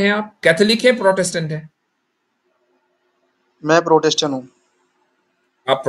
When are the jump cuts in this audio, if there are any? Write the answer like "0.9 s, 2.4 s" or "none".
none